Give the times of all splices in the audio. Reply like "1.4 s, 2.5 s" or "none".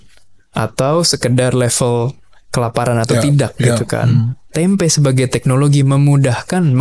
4.4 s